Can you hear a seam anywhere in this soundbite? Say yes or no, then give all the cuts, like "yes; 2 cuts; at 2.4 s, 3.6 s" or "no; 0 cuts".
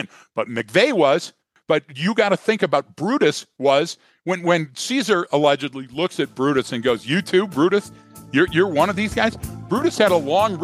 yes; 1 cut; at 1.5 s